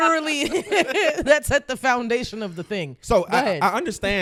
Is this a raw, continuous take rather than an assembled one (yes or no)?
yes